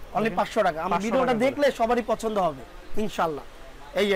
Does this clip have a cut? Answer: no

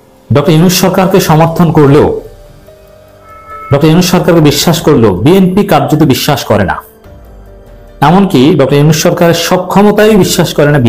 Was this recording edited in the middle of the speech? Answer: no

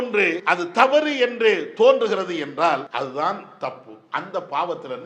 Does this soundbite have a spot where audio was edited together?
yes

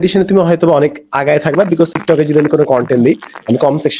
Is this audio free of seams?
no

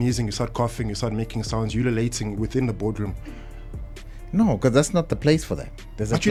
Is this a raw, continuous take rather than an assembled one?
yes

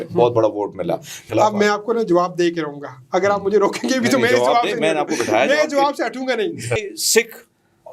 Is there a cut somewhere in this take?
yes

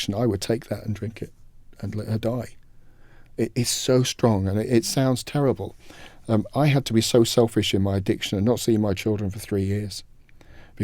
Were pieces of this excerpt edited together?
no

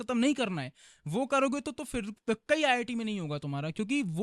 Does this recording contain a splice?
no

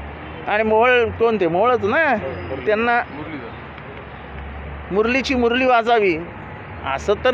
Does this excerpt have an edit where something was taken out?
no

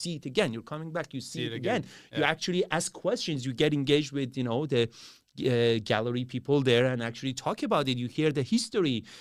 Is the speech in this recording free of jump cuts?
yes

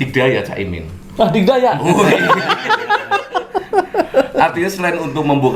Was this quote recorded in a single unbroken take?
yes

